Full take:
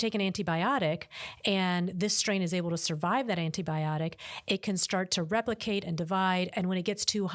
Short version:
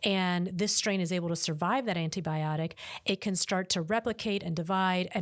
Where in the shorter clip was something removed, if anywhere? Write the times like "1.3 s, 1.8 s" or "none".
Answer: none

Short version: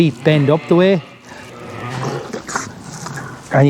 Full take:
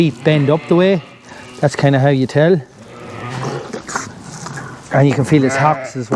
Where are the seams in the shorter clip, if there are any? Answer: 1.4 s

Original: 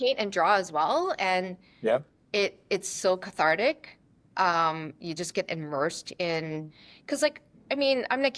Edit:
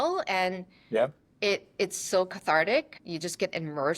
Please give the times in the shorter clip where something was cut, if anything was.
3.0 s

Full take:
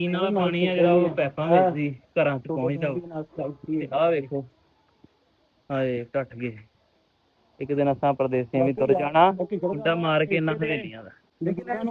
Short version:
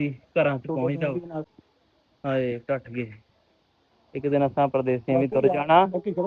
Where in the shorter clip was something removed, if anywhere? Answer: 1.5 s

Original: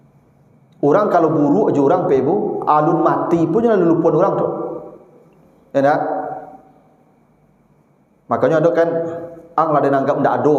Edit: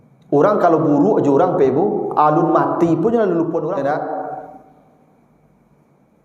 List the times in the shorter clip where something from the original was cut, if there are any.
3.7 s

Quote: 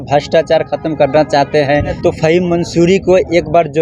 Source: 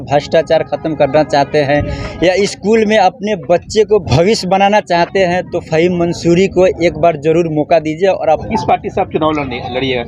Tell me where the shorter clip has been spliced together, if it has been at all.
1.9 s

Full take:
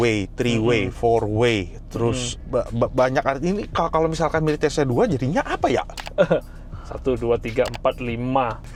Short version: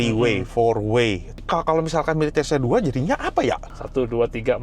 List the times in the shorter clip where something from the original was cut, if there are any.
1.4 s, 3.7 s

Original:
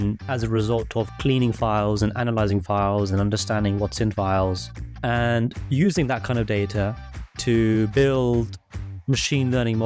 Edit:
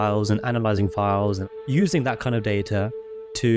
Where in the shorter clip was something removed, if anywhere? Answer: 1.5 s

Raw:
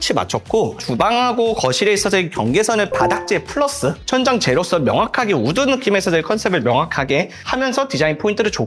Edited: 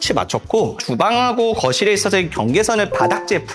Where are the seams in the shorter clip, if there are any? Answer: none

